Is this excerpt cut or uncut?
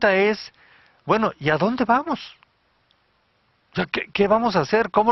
uncut